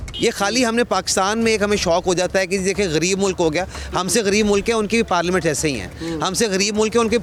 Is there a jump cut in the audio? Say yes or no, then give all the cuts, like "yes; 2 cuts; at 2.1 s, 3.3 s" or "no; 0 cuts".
no; 0 cuts